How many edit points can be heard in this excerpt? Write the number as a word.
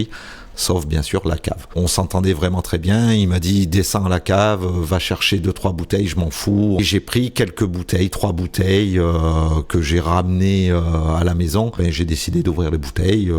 three